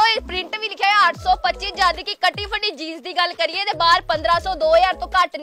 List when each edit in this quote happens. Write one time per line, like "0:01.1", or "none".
none